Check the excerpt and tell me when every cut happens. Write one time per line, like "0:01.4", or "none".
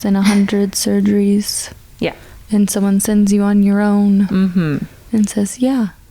0:04.9